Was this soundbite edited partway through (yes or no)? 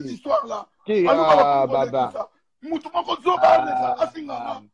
no